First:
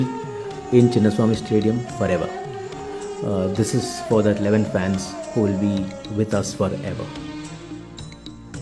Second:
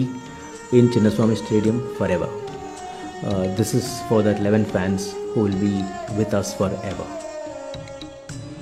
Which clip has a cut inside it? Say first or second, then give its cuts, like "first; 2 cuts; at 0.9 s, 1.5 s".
first; 1 cut; at 7.0 s